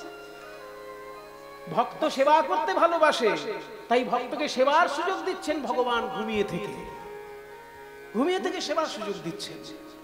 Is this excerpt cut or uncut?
uncut